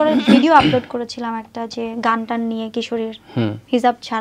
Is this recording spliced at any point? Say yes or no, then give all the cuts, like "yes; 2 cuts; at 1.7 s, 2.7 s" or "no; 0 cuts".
no; 0 cuts